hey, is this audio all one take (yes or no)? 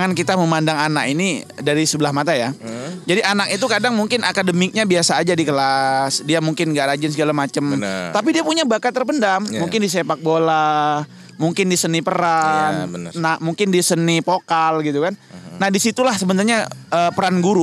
yes